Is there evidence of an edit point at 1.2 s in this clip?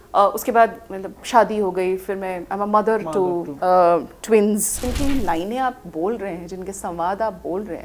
no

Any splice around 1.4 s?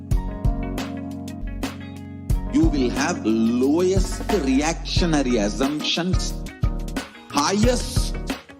yes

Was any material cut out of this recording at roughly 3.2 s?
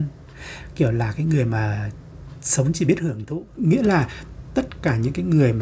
yes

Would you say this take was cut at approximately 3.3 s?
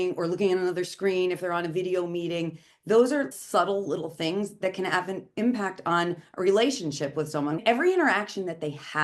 yes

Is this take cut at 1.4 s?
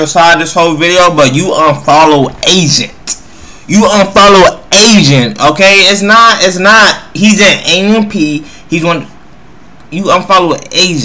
no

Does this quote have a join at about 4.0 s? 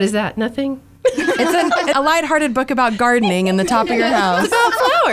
no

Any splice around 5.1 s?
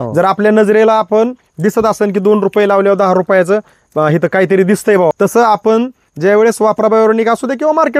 yes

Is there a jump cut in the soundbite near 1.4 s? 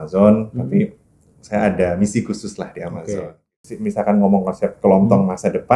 no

